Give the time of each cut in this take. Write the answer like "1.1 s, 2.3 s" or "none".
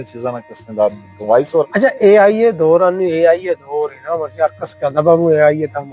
1.6 s